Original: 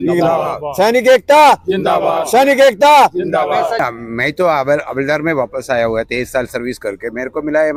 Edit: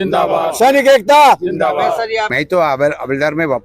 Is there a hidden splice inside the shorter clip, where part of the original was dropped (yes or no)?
yes